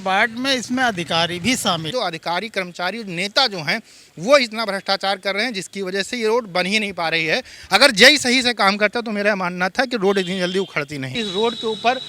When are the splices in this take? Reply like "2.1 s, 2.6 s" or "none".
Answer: 1.9 s, 11.2 s